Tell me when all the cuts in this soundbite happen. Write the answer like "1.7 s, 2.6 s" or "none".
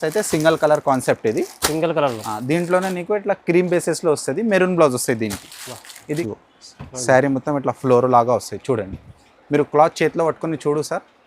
6.2 s